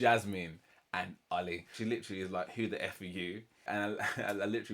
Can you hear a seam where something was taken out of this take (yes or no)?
yes